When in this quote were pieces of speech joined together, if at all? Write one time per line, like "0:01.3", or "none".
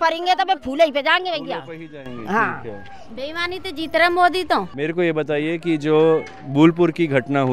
0:04.7